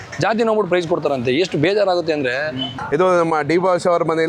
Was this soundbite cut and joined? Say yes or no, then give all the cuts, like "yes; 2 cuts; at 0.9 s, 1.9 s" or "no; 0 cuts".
yes; 1 cut; at 2.7 s